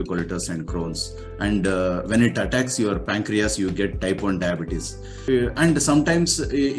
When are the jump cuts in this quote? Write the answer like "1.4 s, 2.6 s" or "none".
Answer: 5.1 s